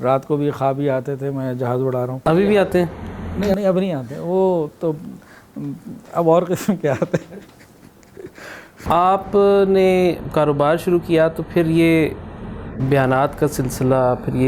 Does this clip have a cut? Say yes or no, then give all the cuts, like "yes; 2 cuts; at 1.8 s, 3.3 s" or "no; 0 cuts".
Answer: yes; 2 cuts; at 2.1 s, 8.8 s